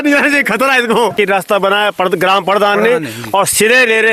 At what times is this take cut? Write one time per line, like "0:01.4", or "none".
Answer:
0:01.1